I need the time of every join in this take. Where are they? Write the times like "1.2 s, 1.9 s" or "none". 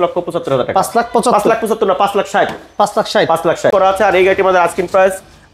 3.7 s